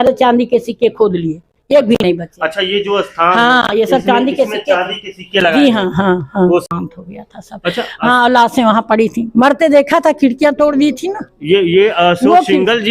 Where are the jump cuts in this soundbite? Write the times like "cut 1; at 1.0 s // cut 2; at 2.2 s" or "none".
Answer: cut 1; at 6.6 s